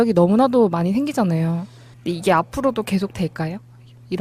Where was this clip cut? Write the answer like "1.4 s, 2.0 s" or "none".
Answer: 1.7 s